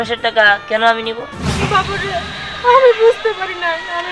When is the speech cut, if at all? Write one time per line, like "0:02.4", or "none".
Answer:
0:01.4